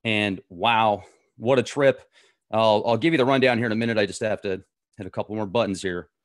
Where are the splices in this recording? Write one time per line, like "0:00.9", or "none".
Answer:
0:03.8